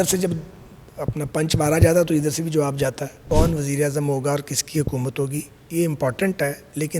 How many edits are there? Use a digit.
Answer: 1